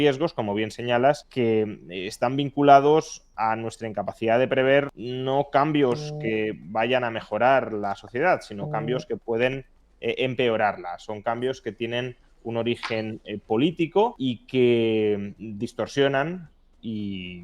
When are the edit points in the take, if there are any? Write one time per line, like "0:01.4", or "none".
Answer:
0:01.3
0:05.0
0:14.2